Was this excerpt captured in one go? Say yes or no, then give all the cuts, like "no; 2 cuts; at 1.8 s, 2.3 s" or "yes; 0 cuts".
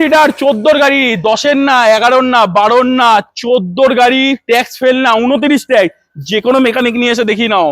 yes; 0 cuts